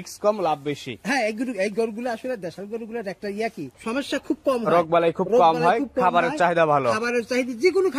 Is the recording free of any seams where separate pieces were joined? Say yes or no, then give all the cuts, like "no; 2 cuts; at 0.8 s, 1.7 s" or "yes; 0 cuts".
no; 1 cut; at 3.7 s